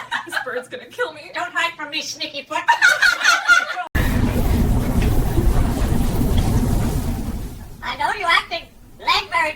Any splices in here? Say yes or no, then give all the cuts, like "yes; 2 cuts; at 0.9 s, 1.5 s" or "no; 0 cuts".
no; 0 cuts